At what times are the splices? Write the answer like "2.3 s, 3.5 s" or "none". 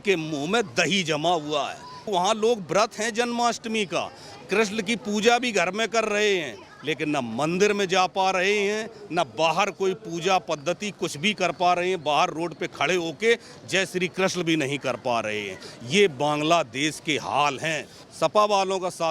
1.9 s, 18.0 s